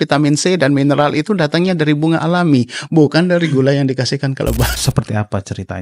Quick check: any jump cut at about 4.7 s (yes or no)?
yes